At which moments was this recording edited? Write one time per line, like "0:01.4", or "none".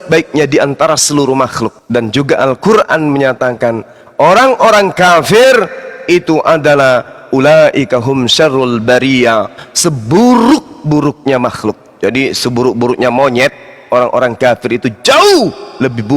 0:01.8